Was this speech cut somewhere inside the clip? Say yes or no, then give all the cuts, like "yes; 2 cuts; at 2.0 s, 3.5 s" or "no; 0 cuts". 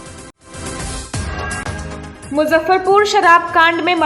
no; 0 cuts